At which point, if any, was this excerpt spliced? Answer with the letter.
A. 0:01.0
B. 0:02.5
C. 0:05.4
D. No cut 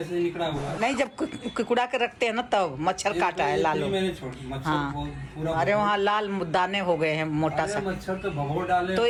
D